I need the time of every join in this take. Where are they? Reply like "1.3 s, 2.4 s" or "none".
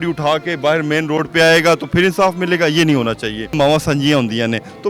3.5 s